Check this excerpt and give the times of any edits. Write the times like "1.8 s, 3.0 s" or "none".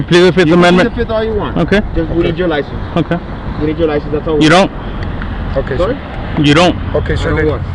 none